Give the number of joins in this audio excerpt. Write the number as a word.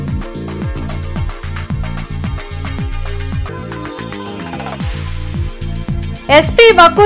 one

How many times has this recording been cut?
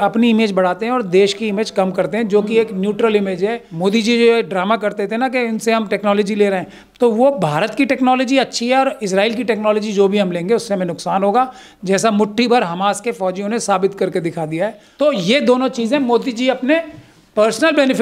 two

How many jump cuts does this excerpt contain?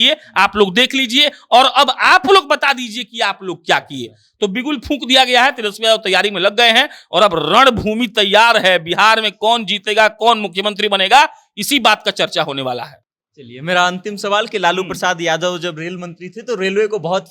zero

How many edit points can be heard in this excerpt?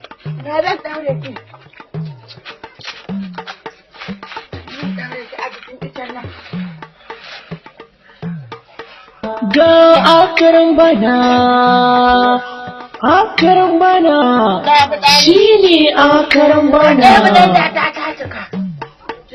one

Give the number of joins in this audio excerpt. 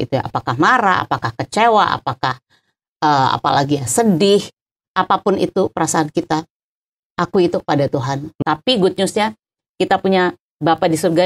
one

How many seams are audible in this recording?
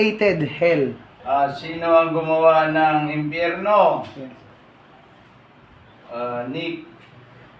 one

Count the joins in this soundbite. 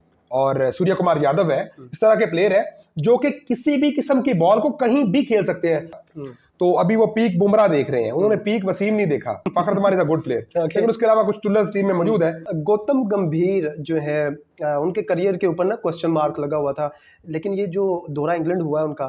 three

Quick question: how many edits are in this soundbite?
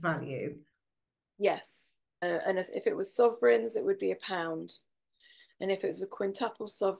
one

